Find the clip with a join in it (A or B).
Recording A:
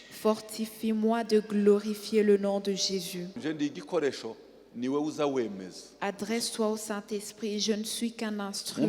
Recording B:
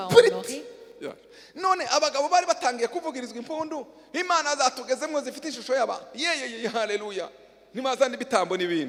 A